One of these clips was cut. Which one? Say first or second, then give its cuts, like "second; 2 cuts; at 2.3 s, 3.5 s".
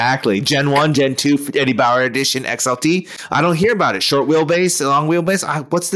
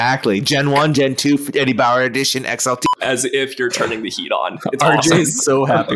second; 1 cut; at 2.8 s